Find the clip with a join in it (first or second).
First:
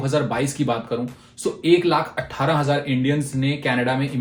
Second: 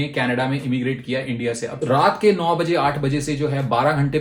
second